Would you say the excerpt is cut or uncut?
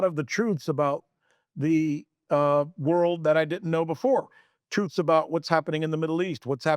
uncut